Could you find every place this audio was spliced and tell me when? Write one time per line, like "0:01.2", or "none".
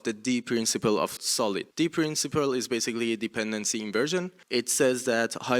0:01.3
0:04.4